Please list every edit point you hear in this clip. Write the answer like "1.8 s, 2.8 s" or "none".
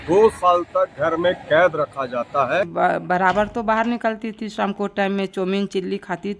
2.7 s